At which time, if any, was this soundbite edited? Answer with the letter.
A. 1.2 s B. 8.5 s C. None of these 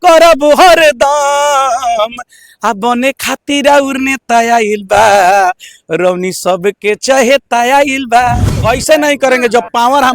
B